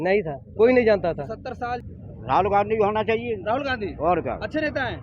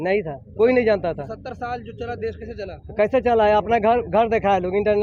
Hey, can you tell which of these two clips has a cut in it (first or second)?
first